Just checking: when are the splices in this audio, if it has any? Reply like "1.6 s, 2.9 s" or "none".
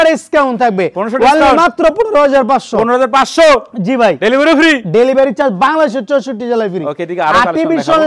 none